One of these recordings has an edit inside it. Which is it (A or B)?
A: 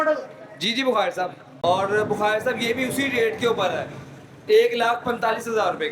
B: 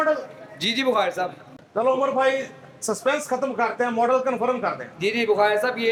A